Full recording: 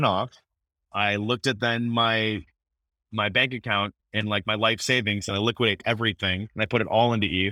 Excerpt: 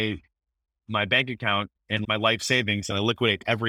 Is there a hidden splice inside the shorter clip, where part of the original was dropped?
yes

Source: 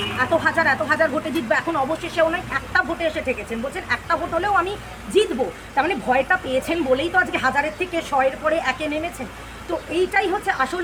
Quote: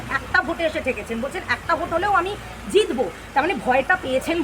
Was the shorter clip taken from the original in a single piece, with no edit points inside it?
yes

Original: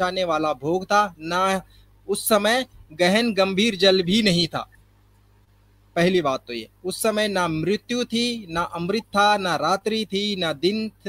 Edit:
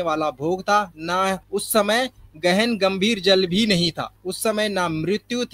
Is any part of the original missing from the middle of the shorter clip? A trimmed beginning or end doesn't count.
yes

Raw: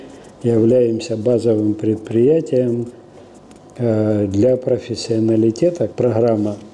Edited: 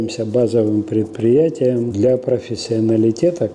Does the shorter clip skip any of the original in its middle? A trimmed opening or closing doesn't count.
yes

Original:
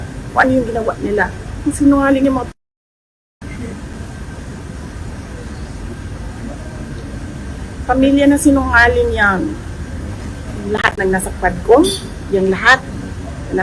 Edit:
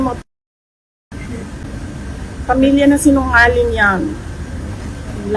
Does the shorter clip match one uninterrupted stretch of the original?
no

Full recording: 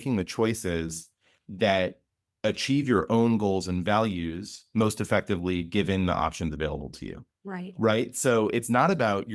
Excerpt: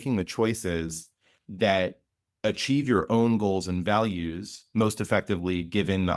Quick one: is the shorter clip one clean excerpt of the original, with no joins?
yes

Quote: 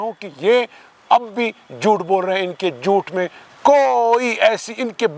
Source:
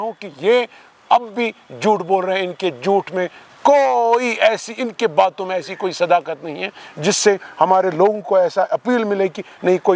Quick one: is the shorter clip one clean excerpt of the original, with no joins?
yes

